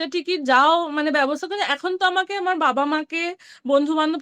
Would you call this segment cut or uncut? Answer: uncut